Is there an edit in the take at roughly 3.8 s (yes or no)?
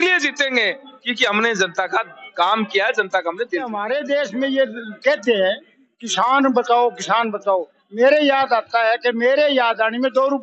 yes